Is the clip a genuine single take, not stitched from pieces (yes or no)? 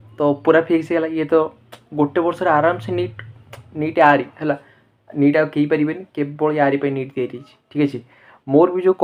yes